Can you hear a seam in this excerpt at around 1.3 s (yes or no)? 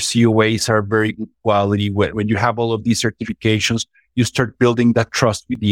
no